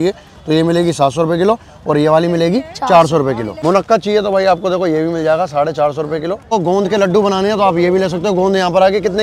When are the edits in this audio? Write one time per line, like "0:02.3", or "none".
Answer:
0:03.5
0:06.5